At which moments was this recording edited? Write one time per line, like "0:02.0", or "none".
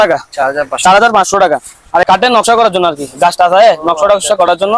0:02.0